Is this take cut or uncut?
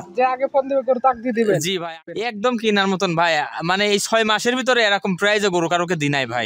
cut